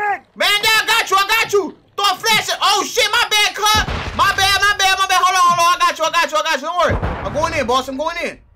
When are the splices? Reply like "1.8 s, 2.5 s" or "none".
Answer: none

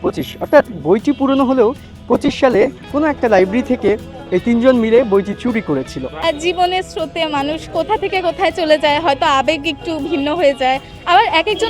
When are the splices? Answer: 6.3 s

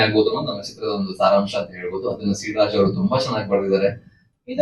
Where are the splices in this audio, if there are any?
none

